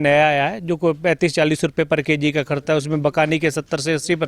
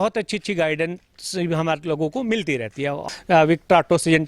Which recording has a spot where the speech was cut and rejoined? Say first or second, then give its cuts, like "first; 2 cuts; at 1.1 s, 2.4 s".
second; 1 cut; at 3.1 s